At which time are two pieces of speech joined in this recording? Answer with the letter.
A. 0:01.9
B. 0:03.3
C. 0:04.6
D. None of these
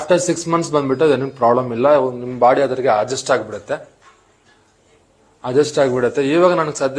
D